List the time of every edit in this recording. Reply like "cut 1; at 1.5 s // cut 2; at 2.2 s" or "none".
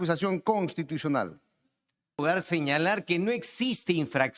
cut 1; at 2.2 s